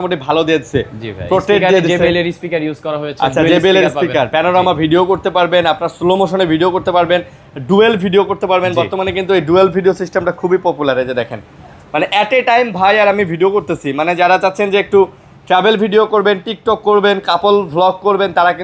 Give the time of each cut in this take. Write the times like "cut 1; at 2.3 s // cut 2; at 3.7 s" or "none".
none